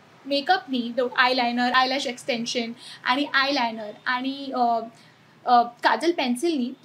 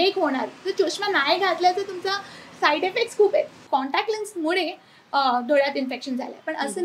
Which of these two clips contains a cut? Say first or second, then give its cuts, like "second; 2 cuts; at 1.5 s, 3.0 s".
second; 1 cut; at 3.6 s